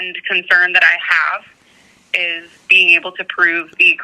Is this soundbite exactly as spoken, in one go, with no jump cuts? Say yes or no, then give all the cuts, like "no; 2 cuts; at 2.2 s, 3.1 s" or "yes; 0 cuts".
yes; 0 cuts